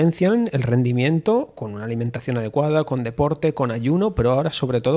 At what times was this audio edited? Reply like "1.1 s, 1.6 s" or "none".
none